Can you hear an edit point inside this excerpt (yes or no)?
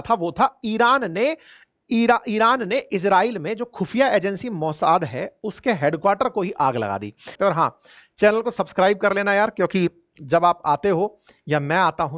yes